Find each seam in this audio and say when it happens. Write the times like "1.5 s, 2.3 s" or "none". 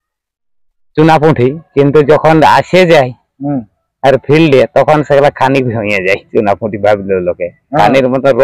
none